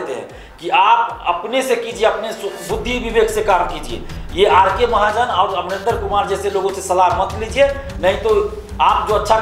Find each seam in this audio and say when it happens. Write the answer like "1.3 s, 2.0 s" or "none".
none